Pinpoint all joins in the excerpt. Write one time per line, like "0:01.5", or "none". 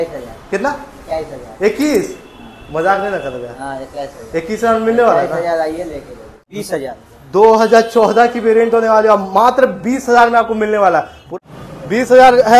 0:06.4
0:11.3